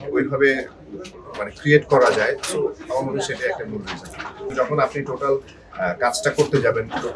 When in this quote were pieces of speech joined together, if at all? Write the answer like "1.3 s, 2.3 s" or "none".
4.5 s